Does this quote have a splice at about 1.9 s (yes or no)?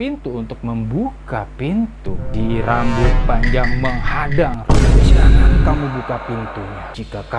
no